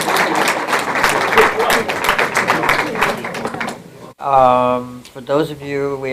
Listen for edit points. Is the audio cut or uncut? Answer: cut